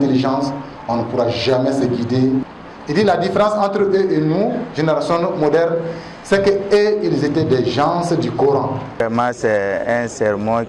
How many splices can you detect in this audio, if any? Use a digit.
2